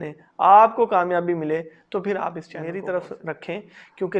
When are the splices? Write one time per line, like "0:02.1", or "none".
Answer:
0:02.5